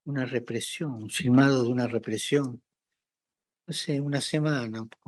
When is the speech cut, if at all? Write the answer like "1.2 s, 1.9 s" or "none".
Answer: none